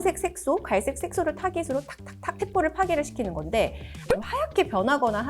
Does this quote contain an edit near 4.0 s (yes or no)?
yes